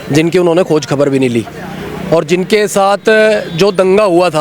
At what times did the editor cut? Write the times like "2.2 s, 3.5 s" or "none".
none